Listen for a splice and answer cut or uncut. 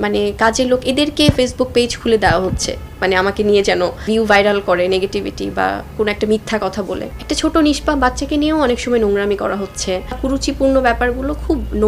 cut